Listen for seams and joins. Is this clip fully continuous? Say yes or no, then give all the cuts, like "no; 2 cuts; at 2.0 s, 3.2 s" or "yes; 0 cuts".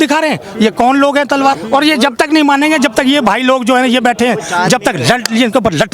no; 1 cut; at 1.6 s